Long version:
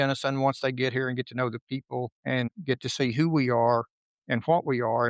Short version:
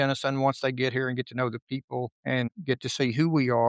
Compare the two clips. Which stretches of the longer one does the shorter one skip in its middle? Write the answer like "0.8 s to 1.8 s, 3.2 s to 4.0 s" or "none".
none